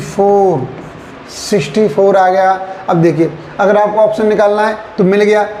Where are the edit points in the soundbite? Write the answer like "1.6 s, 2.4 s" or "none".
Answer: none